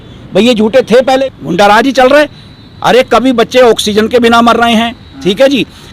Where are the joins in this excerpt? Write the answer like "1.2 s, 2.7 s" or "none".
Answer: 1.2 s